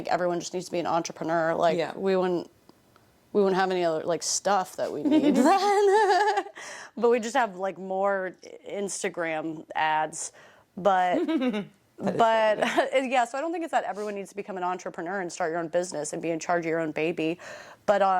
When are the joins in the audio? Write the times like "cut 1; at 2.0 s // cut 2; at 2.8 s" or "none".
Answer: none

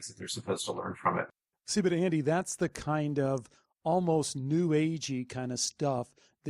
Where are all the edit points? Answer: cut 1; at 1.3 s

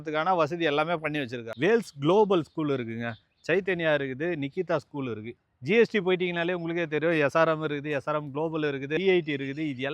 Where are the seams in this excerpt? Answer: cut 1; at 1.5 s // cut 2; at 5.4 s // cut 3; at 9.0 s

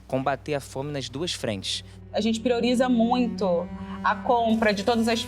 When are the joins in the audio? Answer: cut 1; at 2.0 s

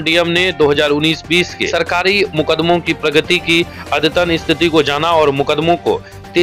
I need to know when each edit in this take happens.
cut 1; at 1.6 s

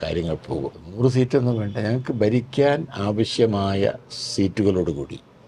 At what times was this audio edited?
cut 1; at 1.0 s

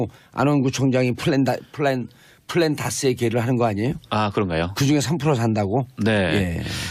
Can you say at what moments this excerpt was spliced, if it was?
cut 1; at 5.4 s

